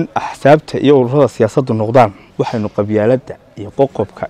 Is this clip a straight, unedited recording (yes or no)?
no